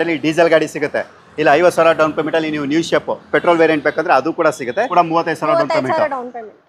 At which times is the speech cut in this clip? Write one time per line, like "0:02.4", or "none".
0:04.9